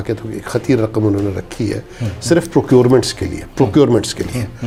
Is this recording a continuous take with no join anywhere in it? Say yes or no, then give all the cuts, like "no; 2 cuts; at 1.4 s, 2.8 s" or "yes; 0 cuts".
yes; 0 cuts